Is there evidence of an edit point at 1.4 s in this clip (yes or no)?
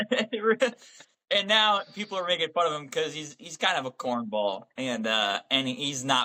no